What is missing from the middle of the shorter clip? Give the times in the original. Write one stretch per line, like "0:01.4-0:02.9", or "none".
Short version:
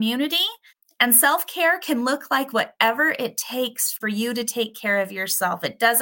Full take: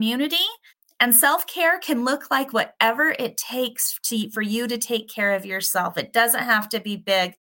0:04.0-0:04.3